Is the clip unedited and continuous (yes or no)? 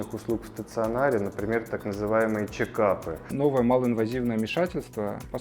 no